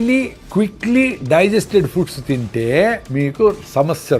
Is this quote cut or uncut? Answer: cut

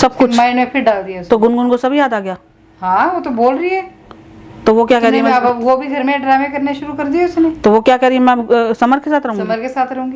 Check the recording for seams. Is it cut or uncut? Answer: uncut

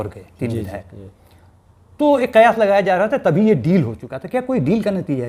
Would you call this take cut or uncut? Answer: uncut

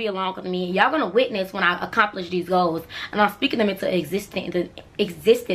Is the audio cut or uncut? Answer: uncut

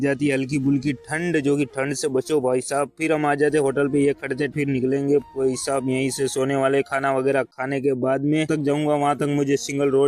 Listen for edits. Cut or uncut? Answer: cut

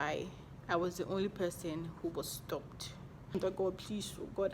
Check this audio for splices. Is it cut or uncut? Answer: cut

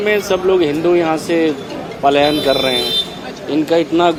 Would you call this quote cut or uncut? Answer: uncut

